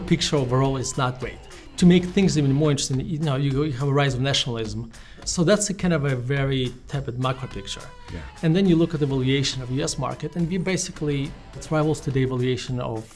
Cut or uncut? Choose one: cut